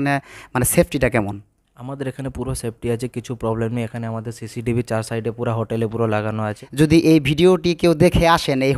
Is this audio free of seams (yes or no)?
no